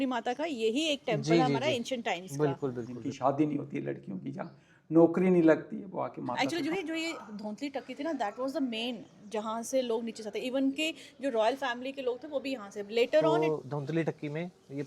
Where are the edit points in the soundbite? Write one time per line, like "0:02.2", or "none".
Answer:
0:02.9
0:06.4
0:13.3